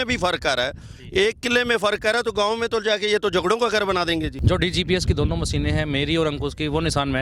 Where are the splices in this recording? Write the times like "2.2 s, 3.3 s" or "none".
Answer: 4.4 s